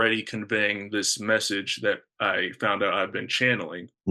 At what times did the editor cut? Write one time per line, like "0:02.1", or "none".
none